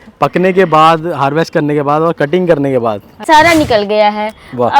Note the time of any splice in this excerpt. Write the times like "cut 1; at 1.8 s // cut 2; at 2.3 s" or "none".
cut 1; at 3.2 s

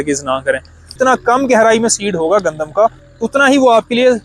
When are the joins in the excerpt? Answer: cut 1; at 0.9 s

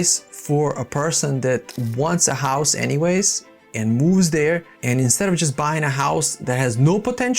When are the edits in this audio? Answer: cut 1; at 1.8 s // cut 2; at 4.7 s

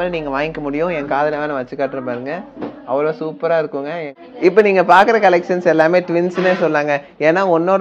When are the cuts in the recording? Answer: cut 1; at 4.1 s

